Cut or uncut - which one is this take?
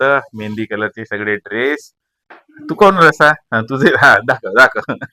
uncut